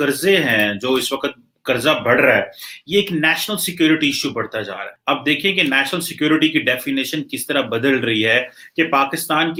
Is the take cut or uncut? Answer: uncut